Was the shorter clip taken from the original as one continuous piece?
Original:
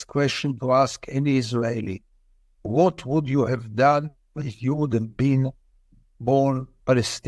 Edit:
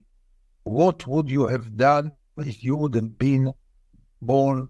yes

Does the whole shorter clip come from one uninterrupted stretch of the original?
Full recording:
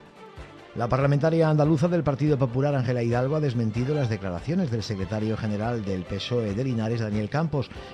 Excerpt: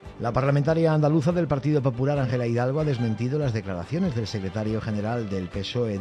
yes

